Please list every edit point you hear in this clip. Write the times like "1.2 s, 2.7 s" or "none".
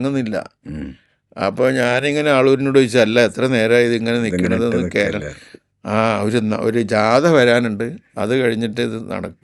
none